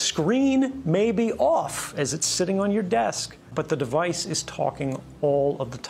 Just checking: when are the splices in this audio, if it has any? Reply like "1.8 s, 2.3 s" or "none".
3.5 s